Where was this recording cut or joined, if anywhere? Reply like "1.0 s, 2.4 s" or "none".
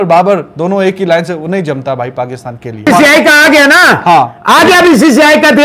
2.9 s